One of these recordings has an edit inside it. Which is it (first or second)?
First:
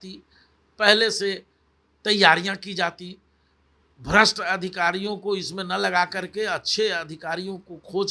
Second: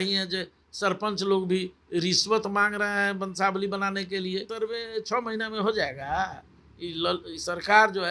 second